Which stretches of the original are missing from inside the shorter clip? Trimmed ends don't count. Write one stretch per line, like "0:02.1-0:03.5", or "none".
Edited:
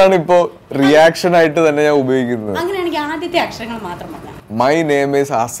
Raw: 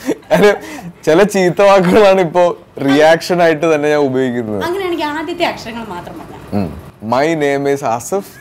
0:06.4-0:06.8